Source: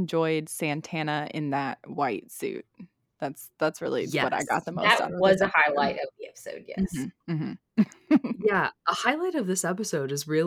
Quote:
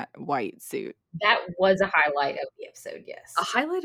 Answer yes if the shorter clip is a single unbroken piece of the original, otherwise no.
no